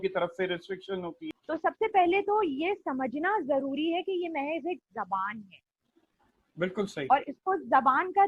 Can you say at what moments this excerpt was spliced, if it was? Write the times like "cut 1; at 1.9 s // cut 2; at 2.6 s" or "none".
cut 1; at 1.3 s